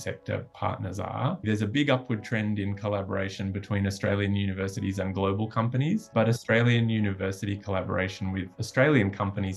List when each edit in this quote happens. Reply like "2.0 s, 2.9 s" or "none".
1.4 s, 6.1 s, 8.6 s